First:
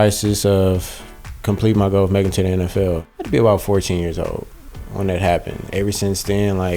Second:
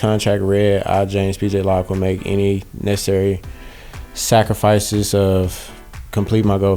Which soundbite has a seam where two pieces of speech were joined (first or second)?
first